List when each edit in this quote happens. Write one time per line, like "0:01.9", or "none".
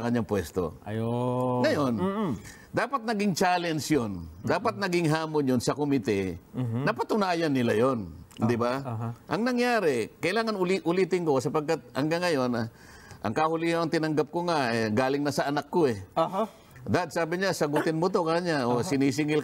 none